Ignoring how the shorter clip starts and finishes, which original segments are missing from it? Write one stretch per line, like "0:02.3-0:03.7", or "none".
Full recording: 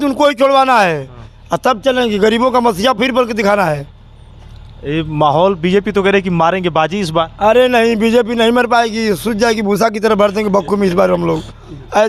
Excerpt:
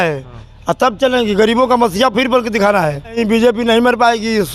0:04.0-0:07.9